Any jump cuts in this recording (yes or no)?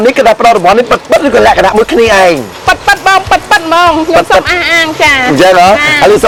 no